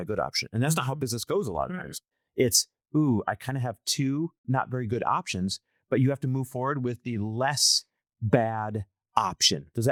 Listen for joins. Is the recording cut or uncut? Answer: uncut